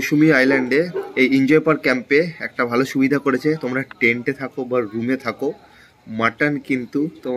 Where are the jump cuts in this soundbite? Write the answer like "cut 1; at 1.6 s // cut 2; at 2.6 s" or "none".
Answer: none